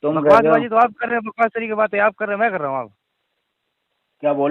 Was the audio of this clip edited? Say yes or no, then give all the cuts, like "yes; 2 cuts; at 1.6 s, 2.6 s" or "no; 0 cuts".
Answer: no; 0 cuts